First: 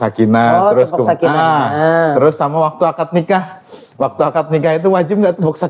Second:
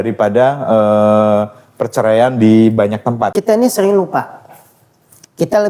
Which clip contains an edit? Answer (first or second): second